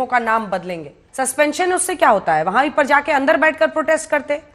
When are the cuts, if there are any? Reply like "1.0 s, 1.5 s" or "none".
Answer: 1.0 s